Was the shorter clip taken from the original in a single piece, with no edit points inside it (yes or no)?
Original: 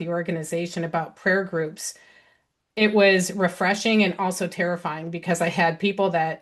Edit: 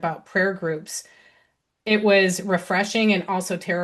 yes